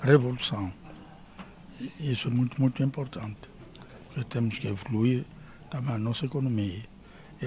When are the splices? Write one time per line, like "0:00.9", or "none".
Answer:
none